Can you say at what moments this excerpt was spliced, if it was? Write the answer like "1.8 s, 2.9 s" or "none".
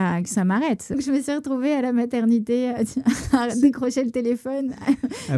1.0 s